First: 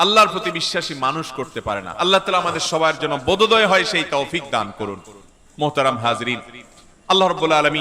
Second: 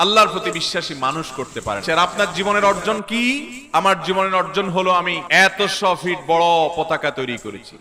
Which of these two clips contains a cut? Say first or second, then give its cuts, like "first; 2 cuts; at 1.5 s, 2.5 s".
second; 2 cuts; at 1.8 s, 5.2 s